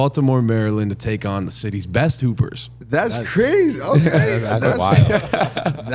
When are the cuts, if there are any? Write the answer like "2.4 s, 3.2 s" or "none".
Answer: none